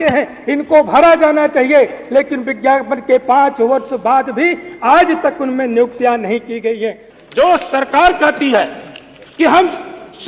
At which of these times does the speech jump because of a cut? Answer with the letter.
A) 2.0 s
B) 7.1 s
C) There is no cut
B